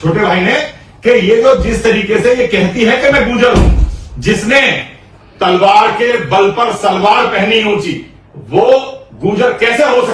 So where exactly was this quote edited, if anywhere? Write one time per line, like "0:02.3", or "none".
none